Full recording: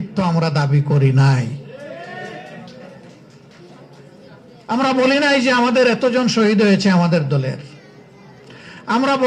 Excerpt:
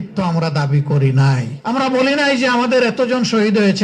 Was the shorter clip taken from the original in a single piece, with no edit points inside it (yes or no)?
no